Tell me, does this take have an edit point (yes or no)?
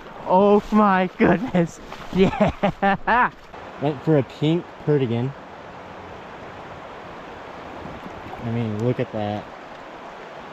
no